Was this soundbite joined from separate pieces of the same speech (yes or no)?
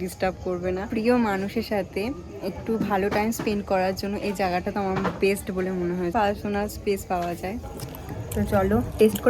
yes